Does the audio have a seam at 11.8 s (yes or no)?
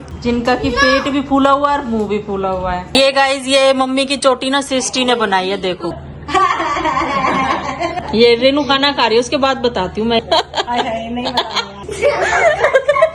yes